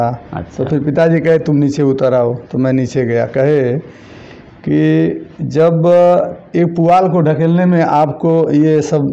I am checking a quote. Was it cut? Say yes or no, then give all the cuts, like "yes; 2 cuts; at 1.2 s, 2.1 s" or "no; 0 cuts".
no; 0 cuts